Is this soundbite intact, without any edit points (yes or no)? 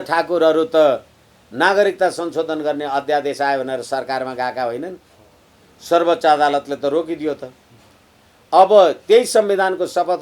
yes